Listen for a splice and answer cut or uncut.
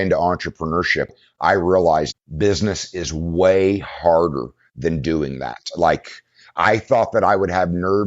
cut